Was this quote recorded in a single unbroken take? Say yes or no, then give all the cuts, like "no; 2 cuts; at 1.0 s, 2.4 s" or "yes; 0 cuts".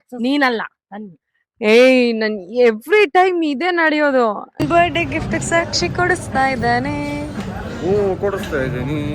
no; 1 cut; at 4.5 s